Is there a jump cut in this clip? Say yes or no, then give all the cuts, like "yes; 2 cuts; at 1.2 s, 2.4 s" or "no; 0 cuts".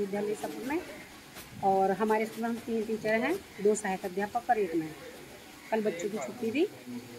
no; 0 cuts